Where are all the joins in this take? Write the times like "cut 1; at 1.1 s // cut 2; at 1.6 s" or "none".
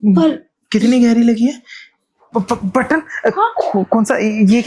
cut 1; at 2.2 s